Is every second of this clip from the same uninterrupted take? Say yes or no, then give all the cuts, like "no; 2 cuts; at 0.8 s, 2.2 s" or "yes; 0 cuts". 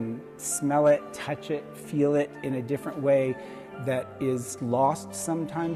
yes; 0 cuts